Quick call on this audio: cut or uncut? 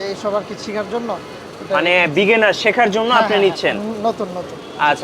uncut